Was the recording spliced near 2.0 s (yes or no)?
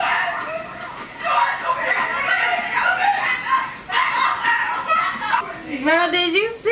no